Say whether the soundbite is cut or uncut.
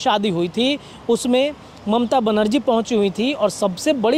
uncut